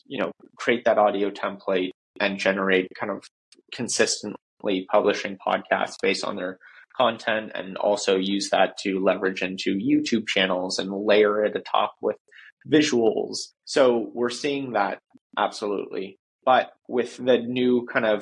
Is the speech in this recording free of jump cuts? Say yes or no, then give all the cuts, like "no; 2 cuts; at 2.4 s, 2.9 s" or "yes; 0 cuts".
yes; 0 cuts